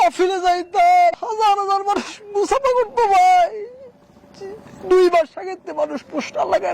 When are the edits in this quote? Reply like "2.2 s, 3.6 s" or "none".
1.2 s